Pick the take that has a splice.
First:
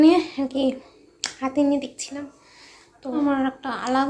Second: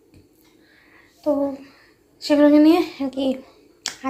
first; 1 cut; at 3.2 s

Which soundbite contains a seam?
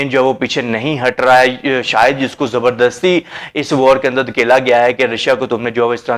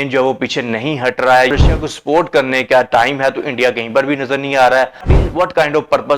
second; 2 cuts; at 1.6 s, 5.1 s

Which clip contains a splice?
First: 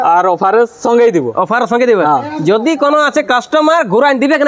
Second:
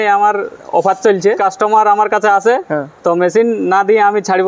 second; 1 cut; at 1.4 s

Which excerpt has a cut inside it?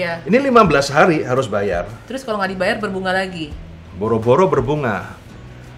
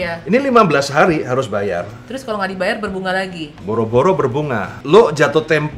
second; 2 cuts; at 3.5 s, 4.7 s

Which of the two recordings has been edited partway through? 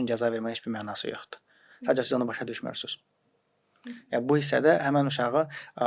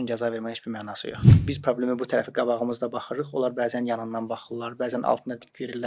second; 1 cut; at 1.4 s

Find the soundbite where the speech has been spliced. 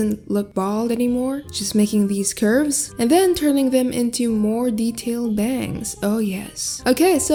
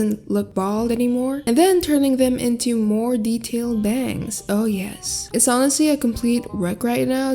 second; 2 cuts; at 1.4 s, 5.1 s

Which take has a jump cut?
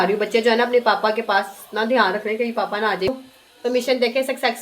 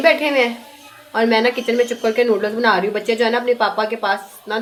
first; 1 cut; at 3.2 s

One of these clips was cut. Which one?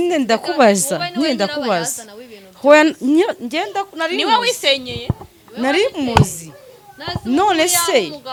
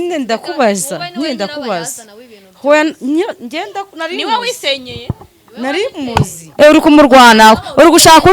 second; 1 cut; at 6.4 s

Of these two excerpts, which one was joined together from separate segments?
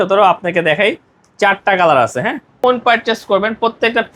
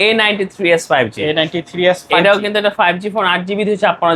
first; 1 cut; at 2.6 s

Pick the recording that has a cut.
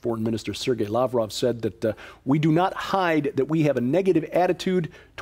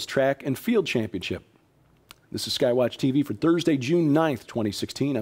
first; 1 cut; at 1.8 s

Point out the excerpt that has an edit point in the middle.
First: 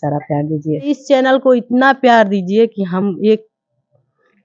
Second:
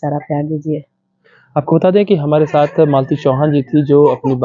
first; 1 cut; at 0.9 s

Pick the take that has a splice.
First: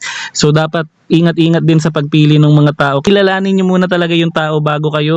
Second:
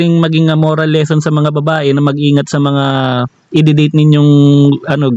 first; 1 cut; at 3.1 s

